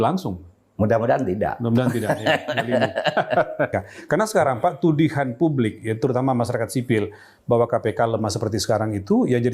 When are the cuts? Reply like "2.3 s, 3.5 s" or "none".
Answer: 3.8 s